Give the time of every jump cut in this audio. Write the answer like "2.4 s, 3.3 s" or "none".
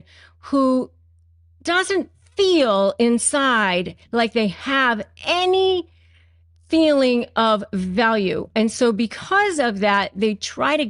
none